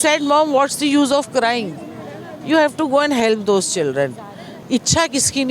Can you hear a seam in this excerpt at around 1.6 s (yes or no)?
no